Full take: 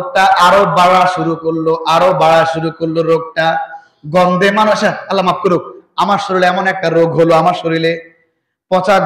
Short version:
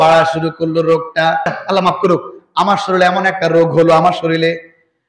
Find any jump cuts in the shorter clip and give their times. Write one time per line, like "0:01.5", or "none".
0:01.6

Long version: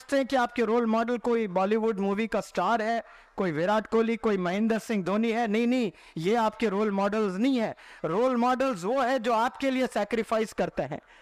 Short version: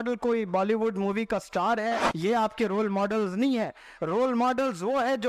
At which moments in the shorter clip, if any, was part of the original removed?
0:02.1

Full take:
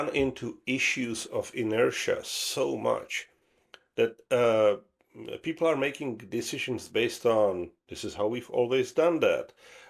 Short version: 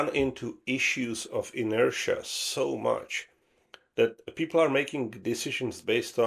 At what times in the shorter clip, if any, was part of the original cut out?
0:04.2

